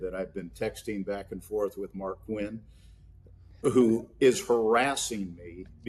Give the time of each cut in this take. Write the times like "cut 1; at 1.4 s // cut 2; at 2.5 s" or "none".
none